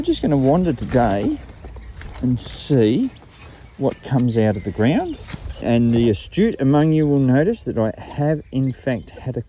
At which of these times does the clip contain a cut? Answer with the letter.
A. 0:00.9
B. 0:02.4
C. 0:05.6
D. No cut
C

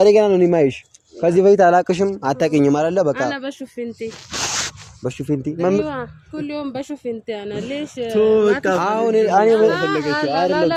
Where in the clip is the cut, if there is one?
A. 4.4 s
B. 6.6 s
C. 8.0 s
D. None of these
D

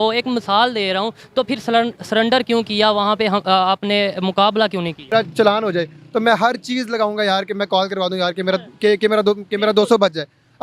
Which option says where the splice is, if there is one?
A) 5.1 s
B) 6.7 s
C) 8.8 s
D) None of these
A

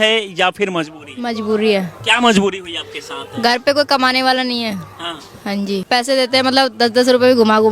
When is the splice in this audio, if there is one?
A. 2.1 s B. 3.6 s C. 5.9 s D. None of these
C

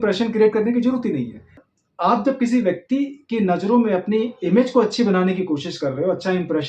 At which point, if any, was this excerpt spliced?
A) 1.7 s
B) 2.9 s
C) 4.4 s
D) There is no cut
A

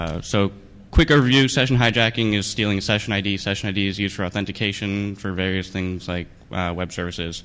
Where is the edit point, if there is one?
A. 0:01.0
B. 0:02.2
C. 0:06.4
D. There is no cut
D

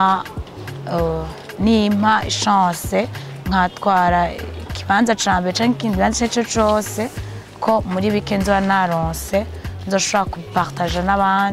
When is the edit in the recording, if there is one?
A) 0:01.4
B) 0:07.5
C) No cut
C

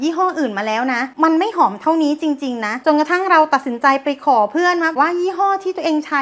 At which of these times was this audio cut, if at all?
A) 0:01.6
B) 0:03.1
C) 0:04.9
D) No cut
C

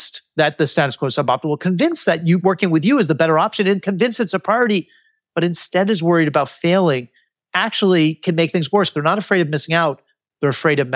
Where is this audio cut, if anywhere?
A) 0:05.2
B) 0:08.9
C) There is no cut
B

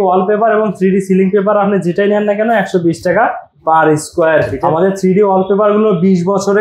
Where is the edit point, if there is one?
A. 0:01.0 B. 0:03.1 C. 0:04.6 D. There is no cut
C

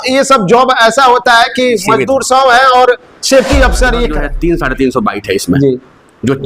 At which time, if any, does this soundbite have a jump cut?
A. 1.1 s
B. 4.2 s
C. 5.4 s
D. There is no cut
B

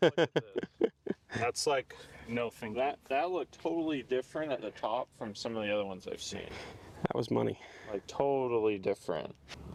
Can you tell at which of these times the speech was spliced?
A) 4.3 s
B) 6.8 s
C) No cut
C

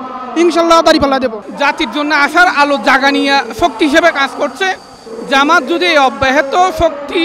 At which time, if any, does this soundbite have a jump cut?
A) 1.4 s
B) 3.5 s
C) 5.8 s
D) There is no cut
A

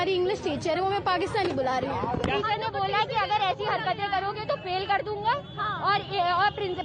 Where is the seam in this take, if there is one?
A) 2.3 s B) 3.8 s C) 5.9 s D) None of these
A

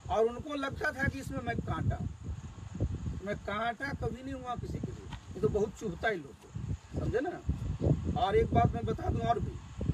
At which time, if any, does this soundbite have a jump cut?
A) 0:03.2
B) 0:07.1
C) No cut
C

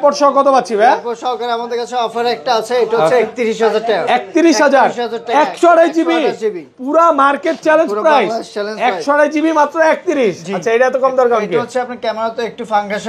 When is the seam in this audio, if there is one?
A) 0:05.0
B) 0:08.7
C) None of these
C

